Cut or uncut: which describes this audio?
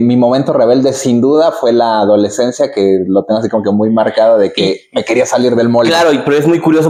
uncut